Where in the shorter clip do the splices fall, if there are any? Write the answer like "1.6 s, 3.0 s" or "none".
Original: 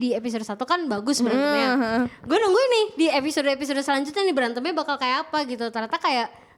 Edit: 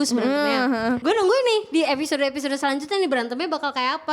1.0 s